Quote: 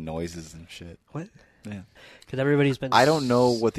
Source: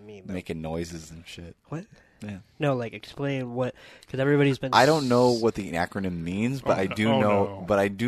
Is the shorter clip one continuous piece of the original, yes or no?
no